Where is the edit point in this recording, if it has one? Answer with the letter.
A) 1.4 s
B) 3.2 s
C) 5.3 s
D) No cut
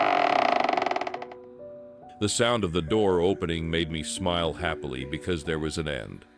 D